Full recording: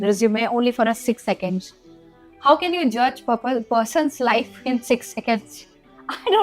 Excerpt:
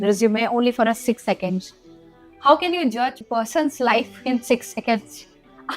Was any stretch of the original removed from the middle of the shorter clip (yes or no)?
yes